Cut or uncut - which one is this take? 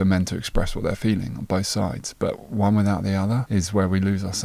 cut